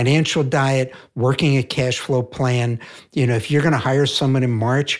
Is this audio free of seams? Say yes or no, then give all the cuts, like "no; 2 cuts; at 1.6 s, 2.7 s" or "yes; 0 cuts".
yes; 0 cuts